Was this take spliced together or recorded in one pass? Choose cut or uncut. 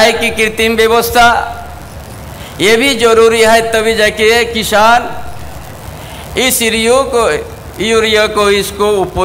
uncut